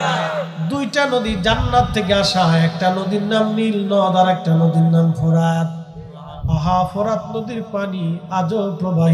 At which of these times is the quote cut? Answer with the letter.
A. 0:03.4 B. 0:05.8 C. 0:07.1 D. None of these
B